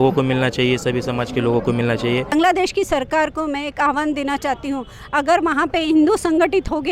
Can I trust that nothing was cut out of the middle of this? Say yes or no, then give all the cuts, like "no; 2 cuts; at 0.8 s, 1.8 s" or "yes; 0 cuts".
no; 1 cut; at 2.3 s